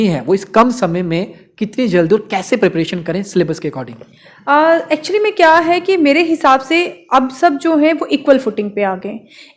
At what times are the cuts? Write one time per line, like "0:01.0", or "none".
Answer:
none